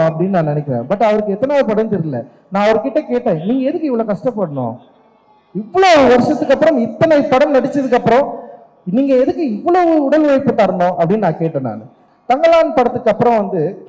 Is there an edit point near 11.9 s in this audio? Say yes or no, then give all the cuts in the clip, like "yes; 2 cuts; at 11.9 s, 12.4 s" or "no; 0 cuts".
yes; 1 cut; at 11.9 s